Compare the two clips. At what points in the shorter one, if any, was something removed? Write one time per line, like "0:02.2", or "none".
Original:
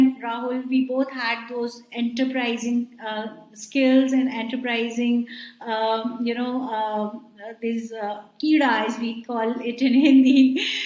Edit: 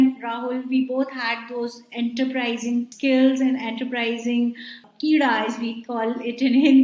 0:02.9
0:04.8